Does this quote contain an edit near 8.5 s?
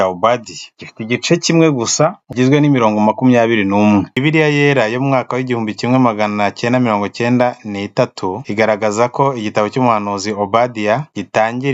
no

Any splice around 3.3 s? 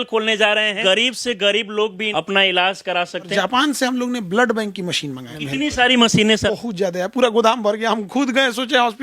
yes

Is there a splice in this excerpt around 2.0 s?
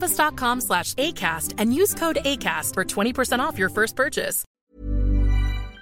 no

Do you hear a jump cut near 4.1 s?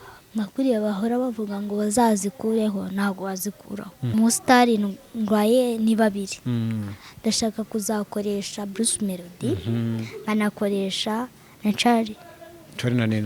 yes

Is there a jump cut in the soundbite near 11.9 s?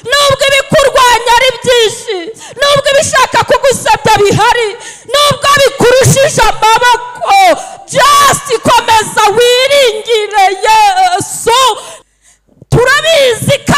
yes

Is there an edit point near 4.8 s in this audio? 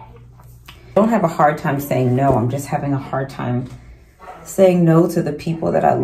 no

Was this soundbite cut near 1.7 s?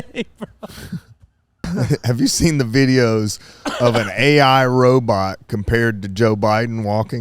yes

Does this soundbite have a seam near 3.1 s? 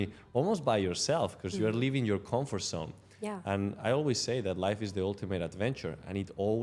no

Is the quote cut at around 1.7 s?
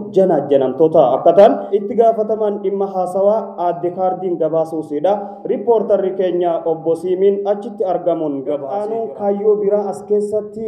yes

